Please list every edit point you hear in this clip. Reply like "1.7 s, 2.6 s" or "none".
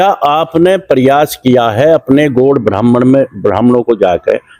none